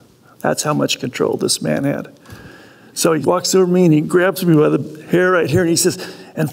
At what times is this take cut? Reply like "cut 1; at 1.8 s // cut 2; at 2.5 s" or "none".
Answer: cut 1; at 3.2 s